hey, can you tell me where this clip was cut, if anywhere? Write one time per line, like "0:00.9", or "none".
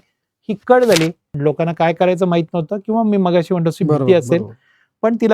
0:01.2